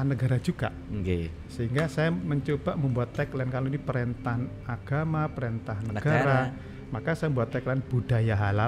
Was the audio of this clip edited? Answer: no; 0 cuts

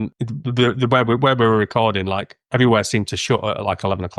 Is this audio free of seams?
yes; 0 cuts

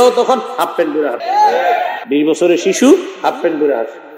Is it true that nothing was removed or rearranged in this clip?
no; 2 cuts; at 1.2 s, 2.0 s

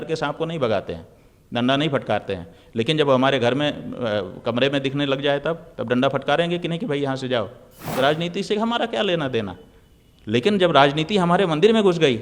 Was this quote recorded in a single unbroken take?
no; 1 cut; at 7.9 s

